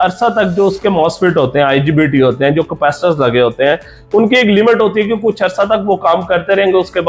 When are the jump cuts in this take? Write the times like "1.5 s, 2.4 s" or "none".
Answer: none